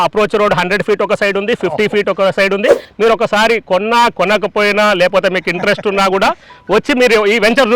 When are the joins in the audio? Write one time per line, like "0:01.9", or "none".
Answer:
0:02.8